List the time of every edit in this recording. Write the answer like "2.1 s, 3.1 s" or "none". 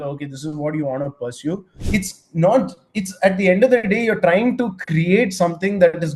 1.7 s

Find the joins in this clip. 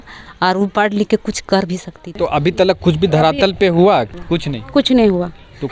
2.1 s, 4.1 s

